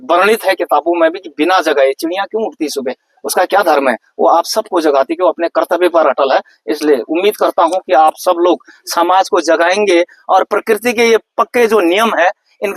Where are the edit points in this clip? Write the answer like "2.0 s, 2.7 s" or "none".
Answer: none